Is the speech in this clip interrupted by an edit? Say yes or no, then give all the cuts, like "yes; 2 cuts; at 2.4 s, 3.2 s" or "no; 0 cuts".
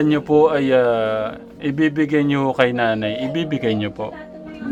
no; 0 cuts